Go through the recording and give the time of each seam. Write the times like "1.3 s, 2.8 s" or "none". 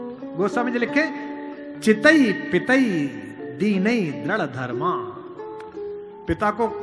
none